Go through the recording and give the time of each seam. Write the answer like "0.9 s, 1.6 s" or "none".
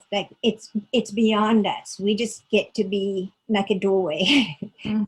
3.3 s